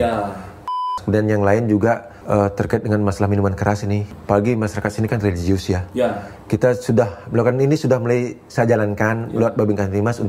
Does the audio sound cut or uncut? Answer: cut